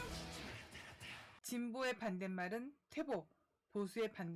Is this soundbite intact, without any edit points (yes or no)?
no